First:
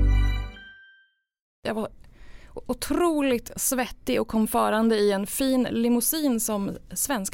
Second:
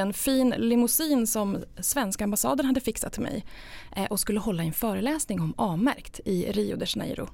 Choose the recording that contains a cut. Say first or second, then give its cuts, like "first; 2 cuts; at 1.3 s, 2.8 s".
first; 1 cut; at 1.6 s